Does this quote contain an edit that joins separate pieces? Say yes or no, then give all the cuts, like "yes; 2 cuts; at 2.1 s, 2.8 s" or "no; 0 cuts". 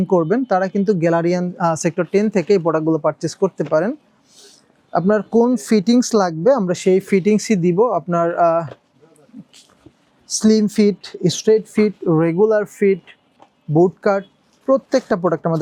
no; 0 cuts